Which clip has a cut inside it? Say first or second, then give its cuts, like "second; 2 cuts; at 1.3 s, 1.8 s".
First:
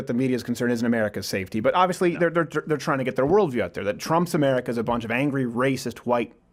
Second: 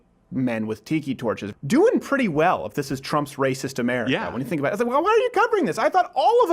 second; 1 cut; at 1.5 s